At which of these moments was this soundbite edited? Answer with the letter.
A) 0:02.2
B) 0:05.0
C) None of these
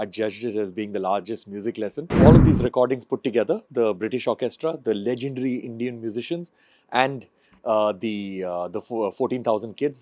A